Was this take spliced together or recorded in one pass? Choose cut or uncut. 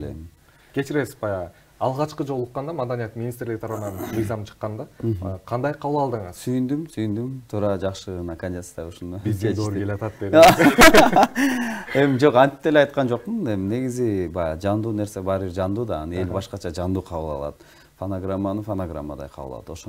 uncut